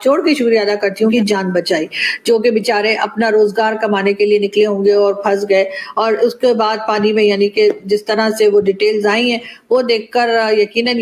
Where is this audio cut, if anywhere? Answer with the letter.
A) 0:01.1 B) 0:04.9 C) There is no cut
A